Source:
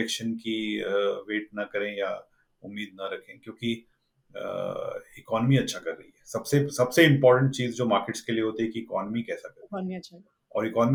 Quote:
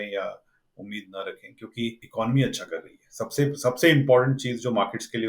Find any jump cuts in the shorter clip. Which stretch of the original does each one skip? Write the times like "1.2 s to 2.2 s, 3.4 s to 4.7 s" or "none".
3.9 s to 5.2 s